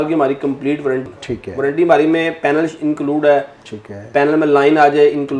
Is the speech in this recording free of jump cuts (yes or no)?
no